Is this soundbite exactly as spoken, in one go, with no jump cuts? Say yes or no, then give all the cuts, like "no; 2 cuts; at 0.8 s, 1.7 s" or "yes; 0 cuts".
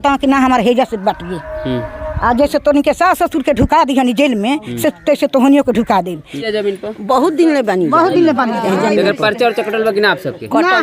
no; 1 cut; at 6.4 s